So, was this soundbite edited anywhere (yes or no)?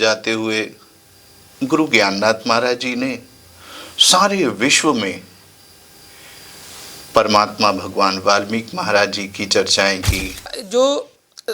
yes